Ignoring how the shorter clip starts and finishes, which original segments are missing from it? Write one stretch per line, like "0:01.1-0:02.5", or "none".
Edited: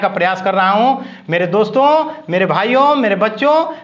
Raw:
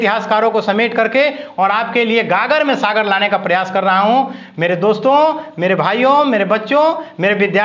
none